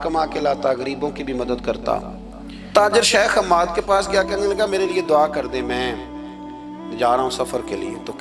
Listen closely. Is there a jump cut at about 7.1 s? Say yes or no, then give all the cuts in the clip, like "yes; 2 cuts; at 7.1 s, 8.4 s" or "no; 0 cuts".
no; 1 cut; at 2.7 s